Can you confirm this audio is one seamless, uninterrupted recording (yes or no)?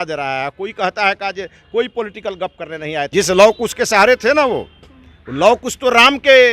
no